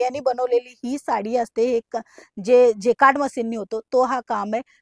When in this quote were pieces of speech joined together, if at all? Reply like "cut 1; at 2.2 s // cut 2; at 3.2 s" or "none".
none

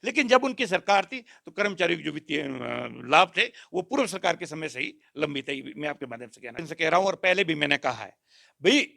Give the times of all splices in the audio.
cut 1; at 6.6 s

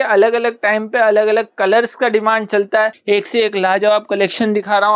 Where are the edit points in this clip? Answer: cut 1; at 3.0 s

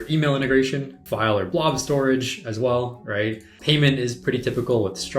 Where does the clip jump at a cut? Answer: cut 1; at 1.0 s // cut 2; at 3.5 s

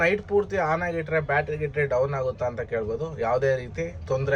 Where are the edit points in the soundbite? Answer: none

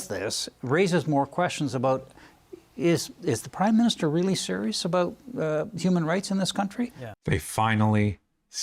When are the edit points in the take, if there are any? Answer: cut 1; at 7.1 s

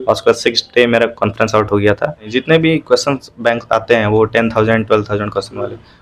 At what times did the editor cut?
cut 1; at 2.3 s

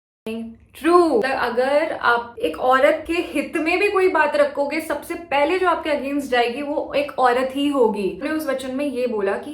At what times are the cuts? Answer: cut 1; at 1.2 s // cut 2; at 8.2 s

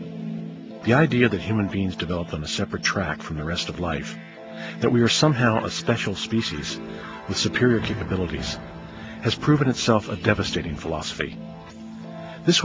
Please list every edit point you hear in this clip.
none

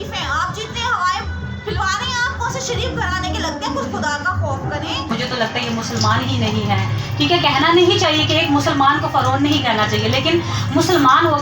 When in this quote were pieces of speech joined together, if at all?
cut 1; at 5.1 s

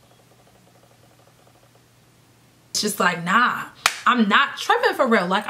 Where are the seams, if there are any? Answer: cut 1; at 2.8 s

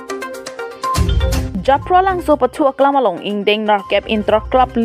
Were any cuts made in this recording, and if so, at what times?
cut 1; at 1.5 s

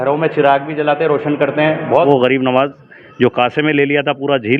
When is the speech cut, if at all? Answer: cut 1; at 2.1 s

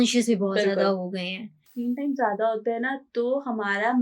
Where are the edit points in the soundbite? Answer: cut 1; at 1.6 s

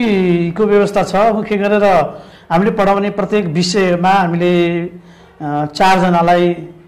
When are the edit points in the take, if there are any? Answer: none

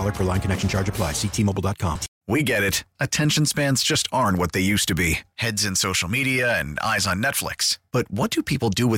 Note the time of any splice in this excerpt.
cut 1; at 2.1 s

